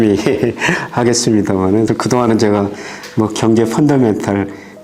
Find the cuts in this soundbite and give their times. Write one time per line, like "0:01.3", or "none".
0:01.9